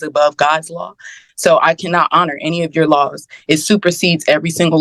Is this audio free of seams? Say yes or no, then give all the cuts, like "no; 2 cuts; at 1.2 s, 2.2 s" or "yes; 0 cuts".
yes; 0 cuts